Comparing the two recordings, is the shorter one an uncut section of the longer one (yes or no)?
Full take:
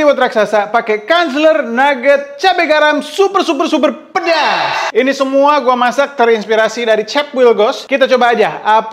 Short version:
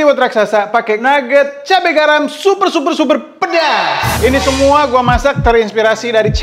no